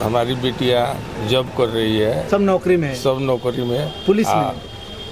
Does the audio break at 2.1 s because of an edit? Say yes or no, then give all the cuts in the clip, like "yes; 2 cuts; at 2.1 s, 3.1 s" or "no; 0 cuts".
no; 0 cuts